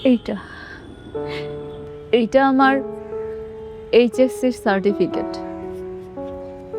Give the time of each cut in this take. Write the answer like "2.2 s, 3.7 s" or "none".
5.1 s